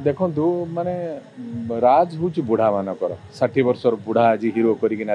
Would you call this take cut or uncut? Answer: uncut